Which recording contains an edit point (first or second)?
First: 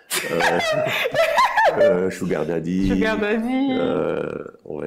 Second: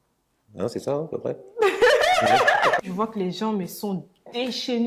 second